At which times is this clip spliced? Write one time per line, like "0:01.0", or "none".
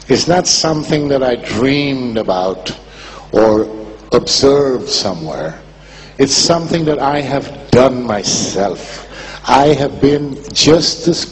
none